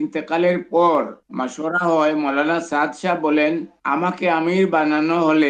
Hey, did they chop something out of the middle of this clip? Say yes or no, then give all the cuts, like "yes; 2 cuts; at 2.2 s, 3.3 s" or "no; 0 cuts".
no; 0 cuts